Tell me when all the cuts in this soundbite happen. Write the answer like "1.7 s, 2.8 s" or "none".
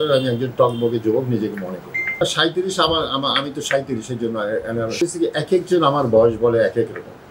2.2 s, 5.0 s